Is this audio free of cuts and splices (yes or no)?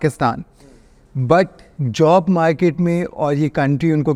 yes